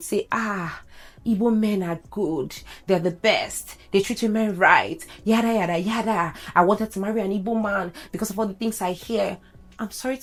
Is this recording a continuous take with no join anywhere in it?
yes; 0 cuts

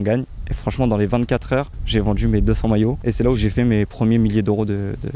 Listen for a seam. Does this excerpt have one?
no; 0 cuts

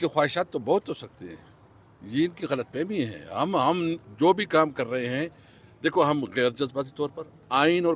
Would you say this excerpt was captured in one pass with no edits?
yes; 0 cuts

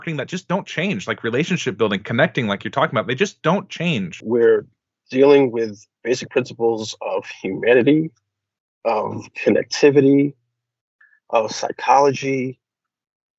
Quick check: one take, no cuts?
no; 1 cut; at 4.2 s

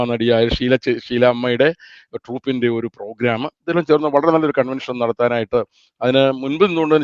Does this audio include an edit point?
no; 0 cuts

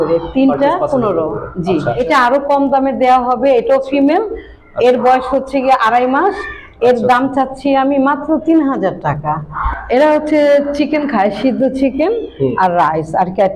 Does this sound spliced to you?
yes; 2 cuts; at 2.0 s, 9.5 s

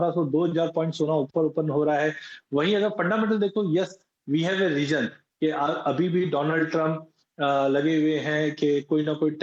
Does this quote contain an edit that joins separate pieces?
no; 0 cuts

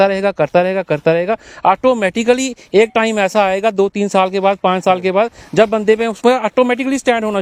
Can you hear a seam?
no; 0 cuts

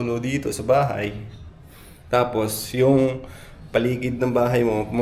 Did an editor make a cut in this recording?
no; 0 cuts

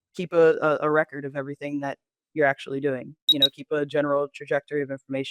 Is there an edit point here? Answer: yes; 1 cut; at 3.3 s

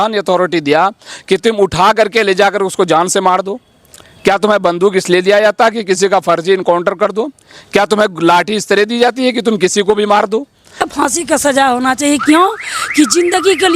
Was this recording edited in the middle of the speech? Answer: yes; 1 cut; at 10.9 s

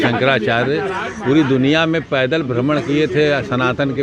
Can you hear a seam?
no; 0 cuts

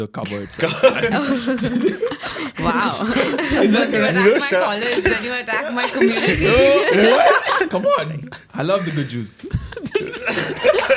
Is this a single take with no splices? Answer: no; 1 cut; at 7.7 s

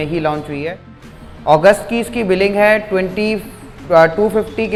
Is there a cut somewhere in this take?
no; 0 cuts

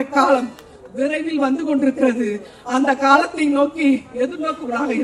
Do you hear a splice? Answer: no; 0 cuts

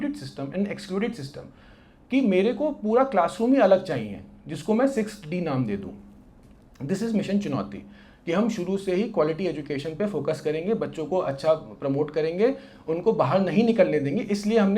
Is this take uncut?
yes; 0 cuts

